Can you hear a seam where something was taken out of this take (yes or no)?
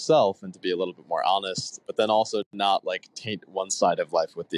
yes